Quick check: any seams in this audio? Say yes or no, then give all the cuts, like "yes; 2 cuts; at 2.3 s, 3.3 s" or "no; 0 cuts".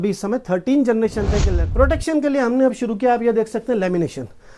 yes; 1 cut; at 1.6 s